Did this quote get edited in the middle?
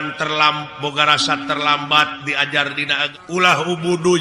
yes; 1 cut; at 3.0 s

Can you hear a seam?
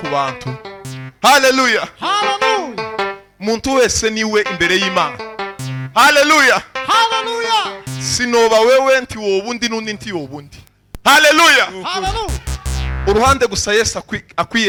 no; 0 cuts

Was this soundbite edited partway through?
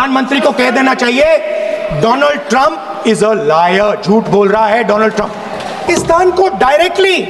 yes; 1 cut; at 5.9 s

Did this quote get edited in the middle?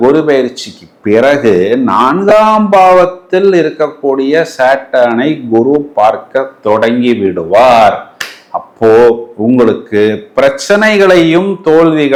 no; 0 cuts

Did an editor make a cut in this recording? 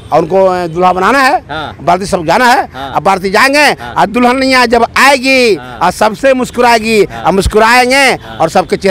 no; 0 cuts

